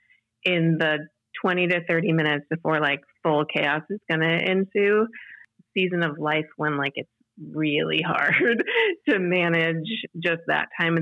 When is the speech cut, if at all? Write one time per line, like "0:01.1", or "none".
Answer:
0:05.5

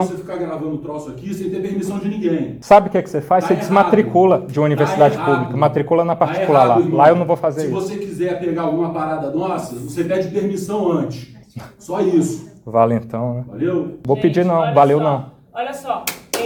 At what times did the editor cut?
none

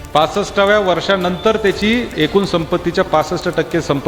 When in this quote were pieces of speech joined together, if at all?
none

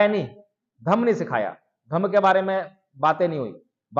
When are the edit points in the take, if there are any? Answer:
none

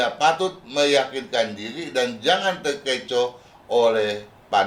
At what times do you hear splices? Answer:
none

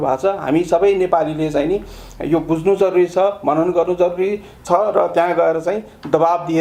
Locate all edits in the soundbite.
none

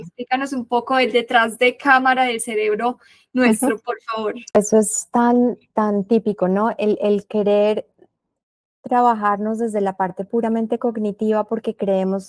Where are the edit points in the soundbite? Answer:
0:04.6

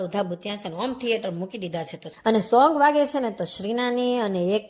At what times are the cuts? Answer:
0:02.0

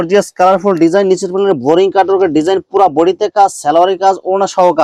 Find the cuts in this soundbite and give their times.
none

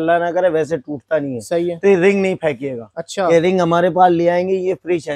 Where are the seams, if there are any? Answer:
none

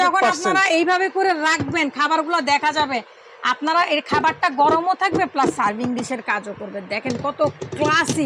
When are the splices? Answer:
none

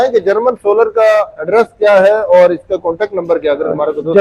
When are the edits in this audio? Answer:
none

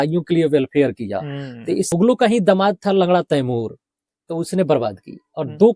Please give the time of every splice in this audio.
0:01.9

